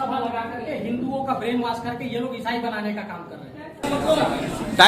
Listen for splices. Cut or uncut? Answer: cut